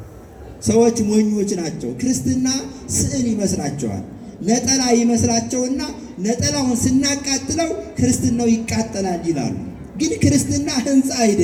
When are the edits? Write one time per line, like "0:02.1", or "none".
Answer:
none